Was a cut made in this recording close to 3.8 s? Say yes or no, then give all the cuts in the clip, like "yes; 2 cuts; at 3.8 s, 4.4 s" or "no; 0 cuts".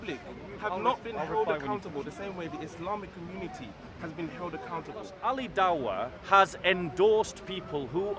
no; 1 cut; at 5.1 s